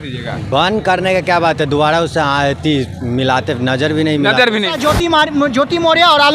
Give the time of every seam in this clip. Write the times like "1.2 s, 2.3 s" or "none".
4.8 s